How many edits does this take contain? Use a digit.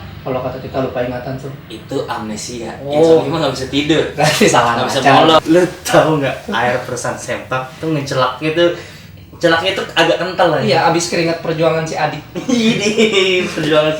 1